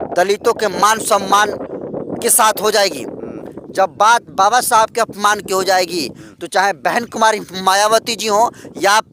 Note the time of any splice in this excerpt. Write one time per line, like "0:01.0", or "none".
none